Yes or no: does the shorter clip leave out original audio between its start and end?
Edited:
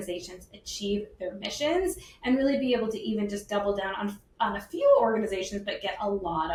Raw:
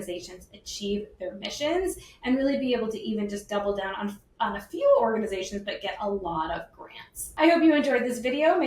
no